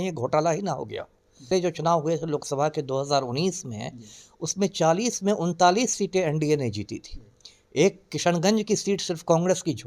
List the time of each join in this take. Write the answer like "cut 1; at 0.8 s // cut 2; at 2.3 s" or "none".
cut 1; at 1.3 s

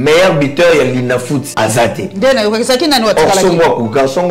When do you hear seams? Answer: cut 1; at 1.5 s

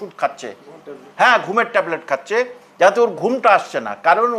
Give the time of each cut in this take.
none

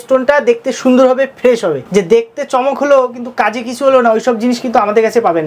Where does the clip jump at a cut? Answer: cut 1; at 1.8 s

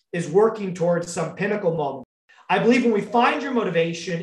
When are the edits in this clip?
cut 1; at 2.0 s

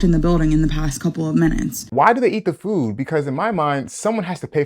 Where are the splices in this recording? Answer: cut 1; at 1.8 s

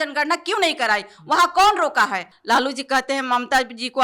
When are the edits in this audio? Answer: cut 1; at 2.3 s

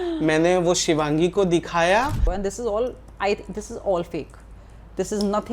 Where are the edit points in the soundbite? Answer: cut 1; at 2.3 s

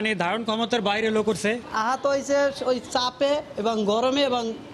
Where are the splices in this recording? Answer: none

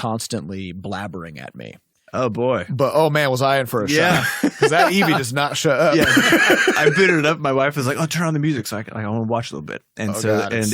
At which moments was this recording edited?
cut 1; at 1.9 s

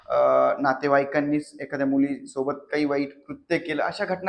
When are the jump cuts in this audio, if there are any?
none

